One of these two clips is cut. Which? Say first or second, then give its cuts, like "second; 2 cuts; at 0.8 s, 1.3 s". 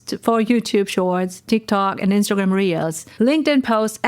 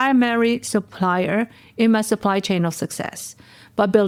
first; 1 cut; at 3.0 s